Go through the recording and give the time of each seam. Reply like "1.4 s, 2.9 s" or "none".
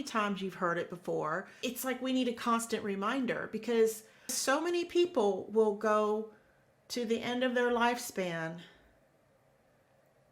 1.5 s, 4.4 s